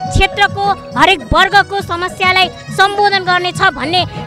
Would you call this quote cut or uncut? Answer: uncut